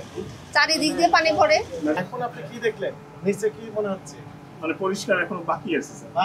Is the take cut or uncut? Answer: cut